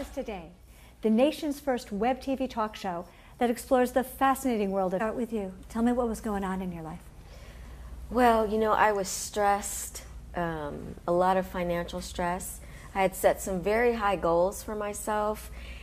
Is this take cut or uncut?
uncut